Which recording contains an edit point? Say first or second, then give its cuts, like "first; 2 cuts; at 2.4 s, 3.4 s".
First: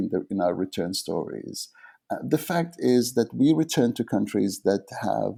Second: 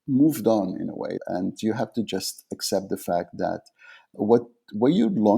second; 2 cuts; at 1.2 s, 4.1 s